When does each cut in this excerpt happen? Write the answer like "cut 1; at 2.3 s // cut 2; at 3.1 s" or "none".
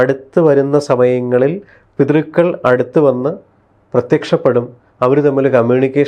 none